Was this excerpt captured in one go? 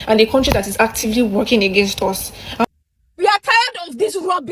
no; 1 cut; at 2.6 s

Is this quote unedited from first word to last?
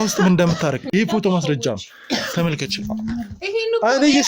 yes; 0 cuts

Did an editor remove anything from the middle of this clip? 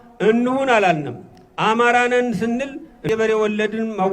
yes; 1 cut; at 3.0 s

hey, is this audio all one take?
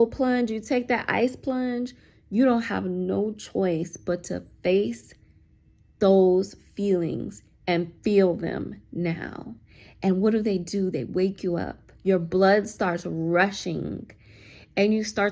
no; 1 cut; at 12.0 s

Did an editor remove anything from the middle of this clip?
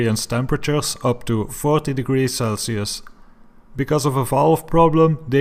no; 0 cuts

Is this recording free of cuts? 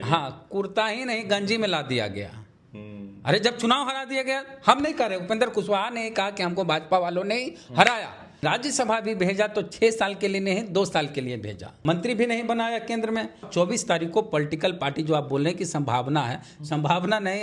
no; 3 cuts; at 8.4 s, 11.8 s, 13.5 s

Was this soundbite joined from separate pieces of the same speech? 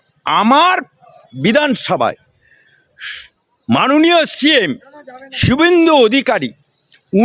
no; 0 cuts

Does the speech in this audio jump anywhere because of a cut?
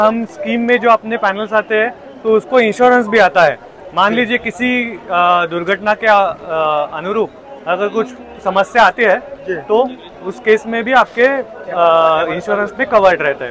no; 0 cuts

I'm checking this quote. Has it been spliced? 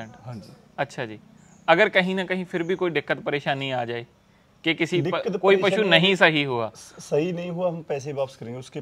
no; 0 cuts

